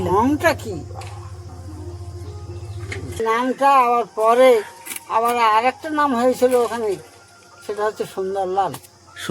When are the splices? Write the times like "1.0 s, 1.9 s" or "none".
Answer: 3.2 s